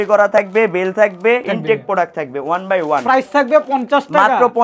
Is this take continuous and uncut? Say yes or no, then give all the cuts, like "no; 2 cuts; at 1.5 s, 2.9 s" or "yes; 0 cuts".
no; 1 cut; at 1.5 s